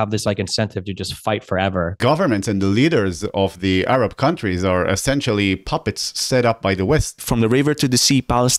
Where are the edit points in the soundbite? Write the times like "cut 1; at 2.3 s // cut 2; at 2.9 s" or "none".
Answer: cut 1; at 2.0 s // cut 2; at 7.2 s